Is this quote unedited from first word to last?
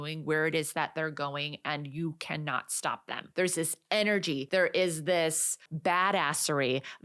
no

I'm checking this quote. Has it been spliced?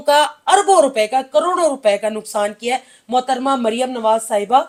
no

